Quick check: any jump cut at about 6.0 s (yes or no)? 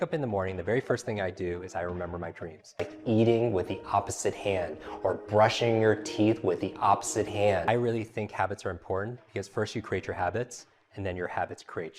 no